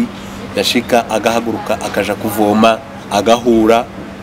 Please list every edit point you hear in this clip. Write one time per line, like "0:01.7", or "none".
0:02.9